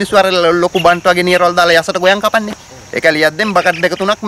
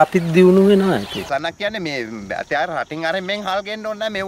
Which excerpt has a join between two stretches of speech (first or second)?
second